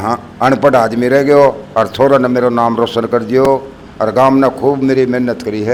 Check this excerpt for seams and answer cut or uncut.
uncut